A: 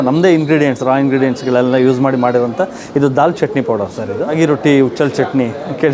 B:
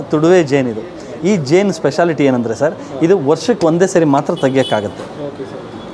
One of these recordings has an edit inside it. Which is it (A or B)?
A